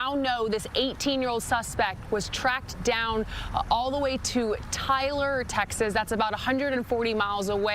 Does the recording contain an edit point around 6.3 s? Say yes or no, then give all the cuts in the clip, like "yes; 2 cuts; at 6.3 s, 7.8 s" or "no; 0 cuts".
yes; 1 cut; at 6.3 s